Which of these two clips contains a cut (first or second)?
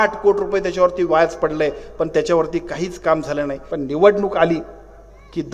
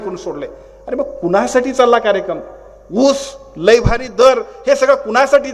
first